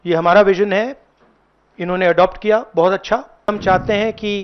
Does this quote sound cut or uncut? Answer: cut